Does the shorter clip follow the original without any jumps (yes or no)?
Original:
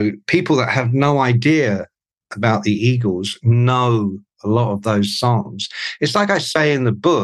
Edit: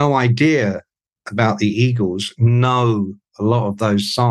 yes